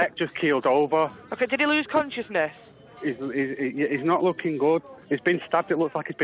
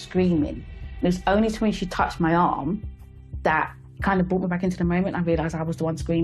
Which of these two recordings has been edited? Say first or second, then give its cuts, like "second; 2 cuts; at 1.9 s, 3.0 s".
first; 1 cut; at 4.9 s